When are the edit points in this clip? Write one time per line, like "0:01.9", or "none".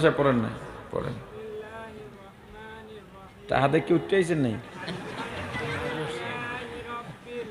0:01.3